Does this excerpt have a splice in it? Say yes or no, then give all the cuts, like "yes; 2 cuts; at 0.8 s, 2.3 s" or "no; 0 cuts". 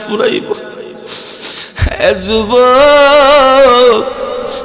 no; 0 cuts